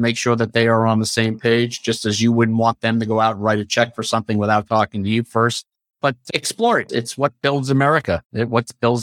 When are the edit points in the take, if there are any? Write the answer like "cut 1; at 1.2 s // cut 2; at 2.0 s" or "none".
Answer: cut 1; at 5.9 s